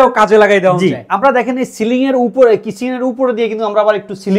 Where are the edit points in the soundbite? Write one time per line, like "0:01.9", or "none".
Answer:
none